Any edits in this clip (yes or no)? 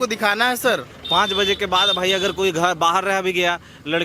yes